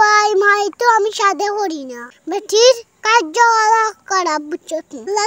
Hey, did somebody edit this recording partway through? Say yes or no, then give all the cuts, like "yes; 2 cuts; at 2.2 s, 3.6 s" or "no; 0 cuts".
no; 0 cuts